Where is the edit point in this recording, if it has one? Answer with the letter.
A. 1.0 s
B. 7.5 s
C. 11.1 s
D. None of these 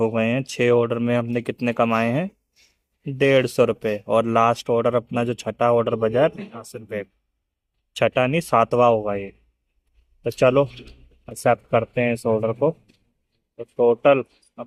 D